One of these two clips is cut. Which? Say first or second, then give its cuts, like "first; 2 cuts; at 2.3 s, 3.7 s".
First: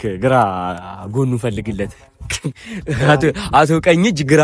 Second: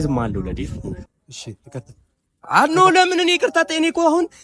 second; 1 cut; at 1.0 s